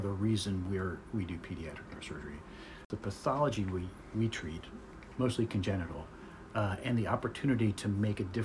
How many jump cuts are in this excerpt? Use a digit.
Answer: 1